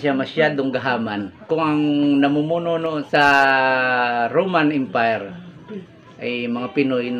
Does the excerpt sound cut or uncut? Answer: cut